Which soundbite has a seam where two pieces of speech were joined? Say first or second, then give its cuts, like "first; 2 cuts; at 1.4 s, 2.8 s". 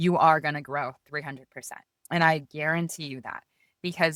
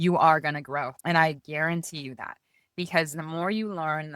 second; 1 cut; at 1.0 s